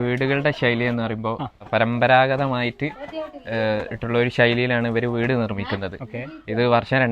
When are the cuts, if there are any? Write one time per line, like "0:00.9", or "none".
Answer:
0:01.6

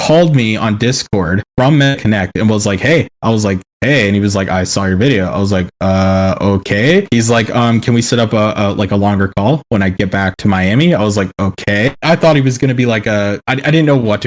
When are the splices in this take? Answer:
0:12.0

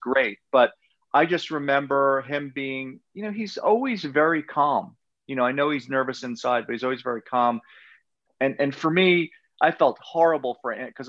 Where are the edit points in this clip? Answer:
0:08.1

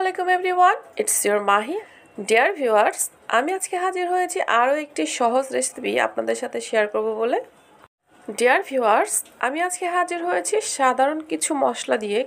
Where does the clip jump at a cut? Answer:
0:01.7

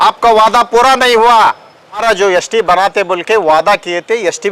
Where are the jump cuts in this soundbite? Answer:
0:02.0

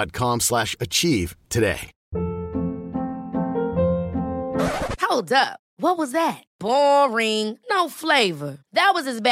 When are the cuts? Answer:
0:01.9

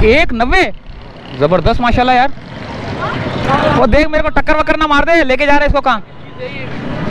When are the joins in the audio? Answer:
0:03.4

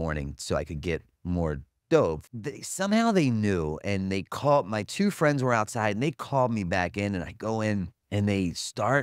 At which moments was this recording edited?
0:02.3
0:08.0

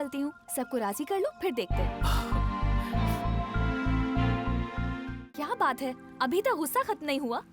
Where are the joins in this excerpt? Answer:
0:05.0

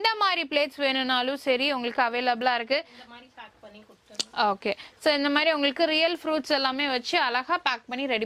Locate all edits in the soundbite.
none

